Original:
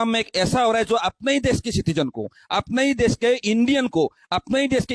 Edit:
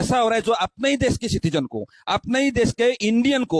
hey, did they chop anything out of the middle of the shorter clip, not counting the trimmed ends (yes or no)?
no